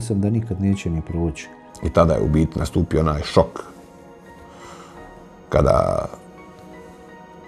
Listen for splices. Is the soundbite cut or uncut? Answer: uncut